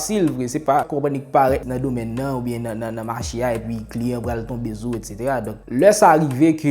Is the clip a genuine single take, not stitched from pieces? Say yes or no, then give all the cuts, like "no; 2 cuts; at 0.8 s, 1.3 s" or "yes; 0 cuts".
no; 3 cuts; at 0.9 s, 1.6 s, 5.6 s